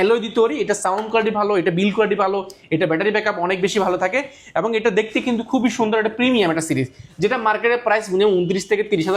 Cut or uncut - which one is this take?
uncut